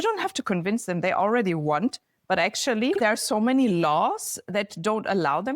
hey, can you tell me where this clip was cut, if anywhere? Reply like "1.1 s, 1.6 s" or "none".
3.0 s, 4.5 s